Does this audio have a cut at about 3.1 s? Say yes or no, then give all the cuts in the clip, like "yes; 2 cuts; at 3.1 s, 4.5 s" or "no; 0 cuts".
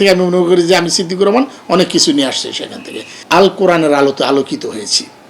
yes; 1 cut; at 3.1 s